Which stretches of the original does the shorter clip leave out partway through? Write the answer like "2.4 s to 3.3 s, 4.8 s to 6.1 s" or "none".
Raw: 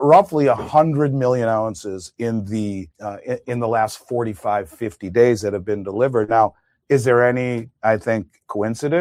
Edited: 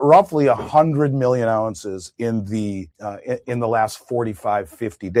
none

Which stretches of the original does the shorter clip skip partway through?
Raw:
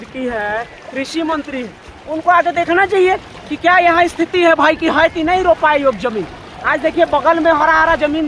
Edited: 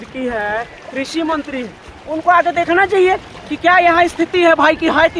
none

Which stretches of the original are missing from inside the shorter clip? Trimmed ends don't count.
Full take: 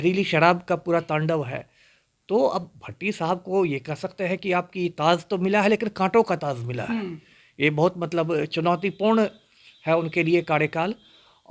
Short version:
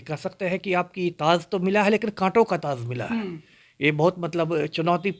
none

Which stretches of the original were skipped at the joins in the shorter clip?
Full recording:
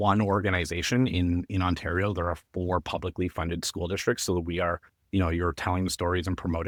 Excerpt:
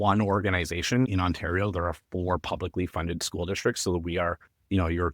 1.1 s to 1.5 s

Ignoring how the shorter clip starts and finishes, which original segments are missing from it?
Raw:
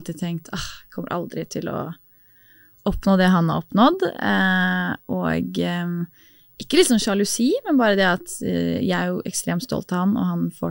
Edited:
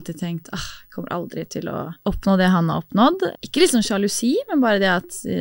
1.9 s to 2.7 s, 4.2 s to 6.5 s

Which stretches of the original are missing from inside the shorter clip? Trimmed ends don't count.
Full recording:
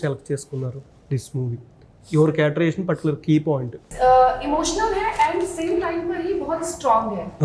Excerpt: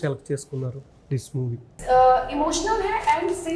1.7 s to 3.8 s

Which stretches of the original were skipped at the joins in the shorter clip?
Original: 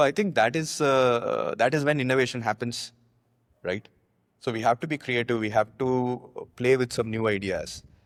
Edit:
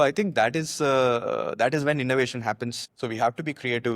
2.8 s to 4.3 s

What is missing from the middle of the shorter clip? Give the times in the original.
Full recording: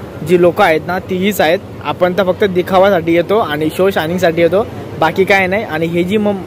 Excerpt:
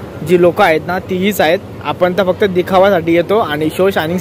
none

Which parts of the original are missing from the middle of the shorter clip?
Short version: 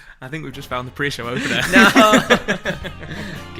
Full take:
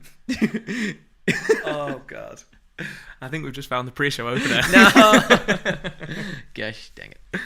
none

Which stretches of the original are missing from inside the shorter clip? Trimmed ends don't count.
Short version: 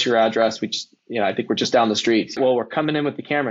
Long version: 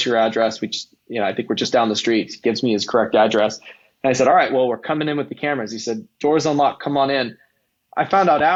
2.4 s to 4.5 s

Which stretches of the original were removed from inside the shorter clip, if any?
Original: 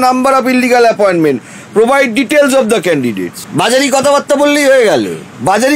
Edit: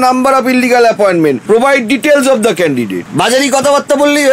1.4 s to 1.7 s, 3.3 s to 3.4 s

